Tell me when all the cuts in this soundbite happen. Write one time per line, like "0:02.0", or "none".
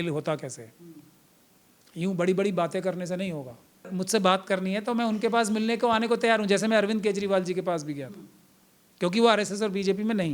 0:03.9